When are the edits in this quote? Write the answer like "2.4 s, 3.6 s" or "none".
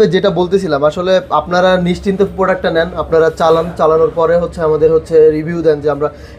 none